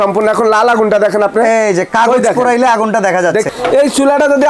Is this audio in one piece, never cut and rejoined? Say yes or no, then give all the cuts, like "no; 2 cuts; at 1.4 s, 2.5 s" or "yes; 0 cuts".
no; 1 cut; at 3.5 s